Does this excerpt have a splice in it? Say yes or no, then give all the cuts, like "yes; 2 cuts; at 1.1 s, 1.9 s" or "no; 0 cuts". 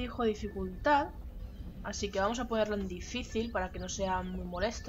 no; 0 cuts